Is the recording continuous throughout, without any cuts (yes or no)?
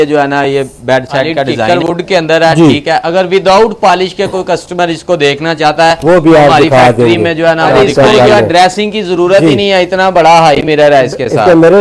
no